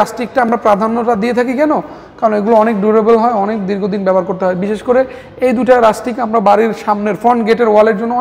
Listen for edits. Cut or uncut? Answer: uncut